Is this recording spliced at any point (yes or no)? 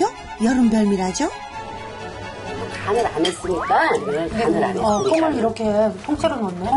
yes